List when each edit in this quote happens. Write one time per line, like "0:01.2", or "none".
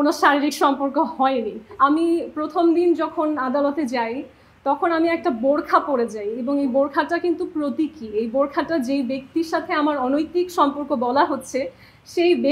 0:01.7
0:06.3

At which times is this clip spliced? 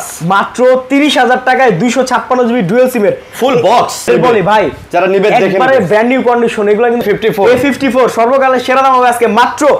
0:04.1
0:07.0

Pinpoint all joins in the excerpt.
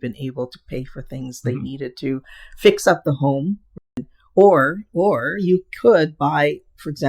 0:03.7

